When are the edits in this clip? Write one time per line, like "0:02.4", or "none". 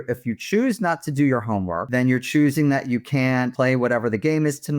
0:01.8
0:03.5